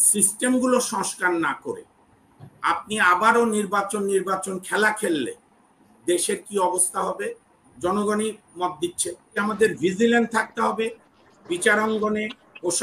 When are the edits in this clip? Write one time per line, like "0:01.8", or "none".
0:09.4